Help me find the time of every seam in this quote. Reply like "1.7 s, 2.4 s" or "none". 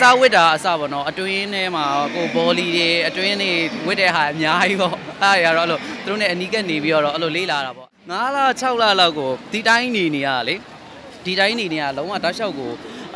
7.8 s

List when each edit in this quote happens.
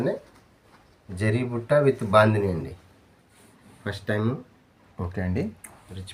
none

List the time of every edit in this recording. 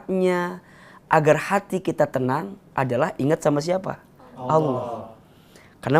none

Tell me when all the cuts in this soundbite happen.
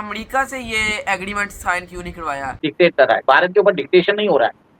2.7 s

